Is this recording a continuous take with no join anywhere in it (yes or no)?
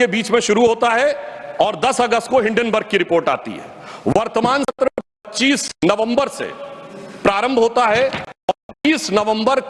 yes